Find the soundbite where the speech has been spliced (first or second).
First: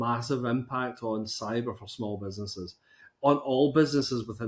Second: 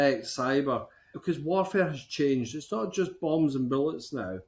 second